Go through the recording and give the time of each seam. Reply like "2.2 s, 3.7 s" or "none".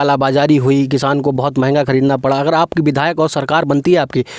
none